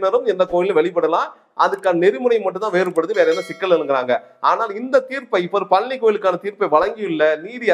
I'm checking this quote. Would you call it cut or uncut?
uncut